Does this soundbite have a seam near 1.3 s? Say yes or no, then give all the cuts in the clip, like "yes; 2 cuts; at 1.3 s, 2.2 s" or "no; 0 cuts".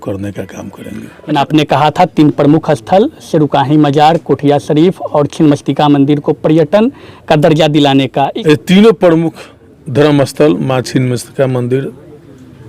yes; 2 cuts; at 1.3 s, 8.4 s